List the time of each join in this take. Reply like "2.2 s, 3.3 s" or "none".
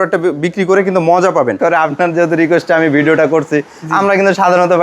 1.9 s